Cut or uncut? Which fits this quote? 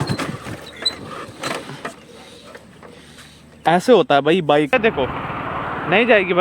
cut